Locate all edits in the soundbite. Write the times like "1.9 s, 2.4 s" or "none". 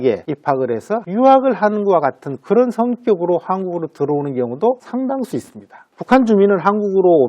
1.0 s